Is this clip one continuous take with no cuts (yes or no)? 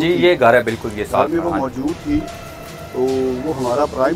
yes